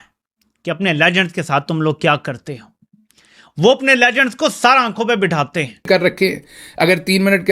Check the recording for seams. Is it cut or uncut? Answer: cut